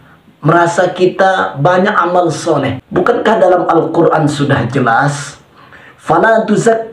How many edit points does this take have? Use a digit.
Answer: 1